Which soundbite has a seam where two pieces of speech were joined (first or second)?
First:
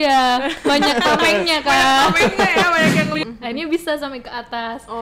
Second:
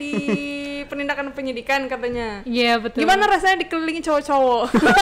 first